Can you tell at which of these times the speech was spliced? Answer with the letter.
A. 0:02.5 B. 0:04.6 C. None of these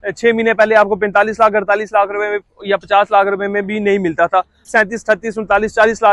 B